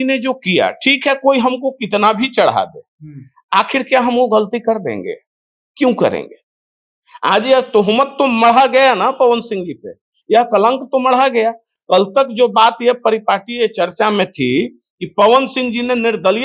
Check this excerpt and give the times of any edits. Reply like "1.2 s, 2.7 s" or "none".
none